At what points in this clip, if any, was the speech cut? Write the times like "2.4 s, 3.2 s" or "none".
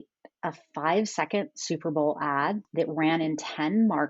2.6 s